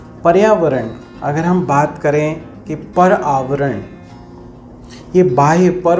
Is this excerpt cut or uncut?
uncut